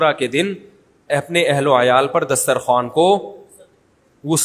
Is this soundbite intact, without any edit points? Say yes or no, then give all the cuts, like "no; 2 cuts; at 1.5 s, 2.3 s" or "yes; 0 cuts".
yes; 0 cuts